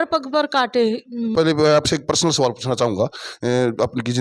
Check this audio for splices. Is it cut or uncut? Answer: cut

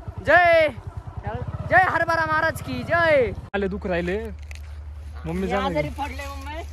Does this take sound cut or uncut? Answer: cut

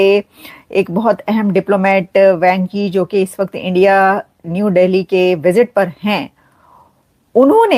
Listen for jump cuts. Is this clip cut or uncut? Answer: uncut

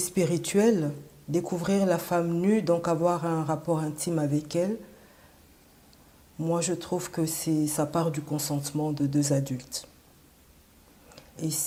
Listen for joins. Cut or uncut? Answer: uncut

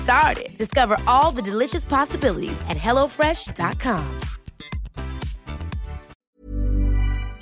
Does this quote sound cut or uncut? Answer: cut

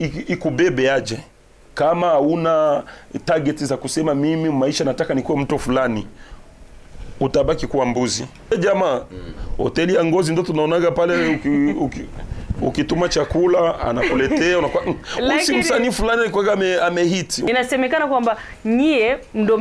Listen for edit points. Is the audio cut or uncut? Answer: cut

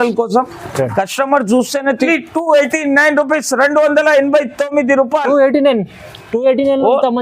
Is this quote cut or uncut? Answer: cut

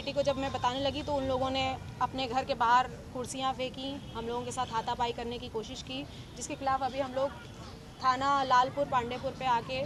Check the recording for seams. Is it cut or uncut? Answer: uncut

